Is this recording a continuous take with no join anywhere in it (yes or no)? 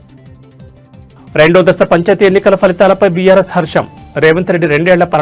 no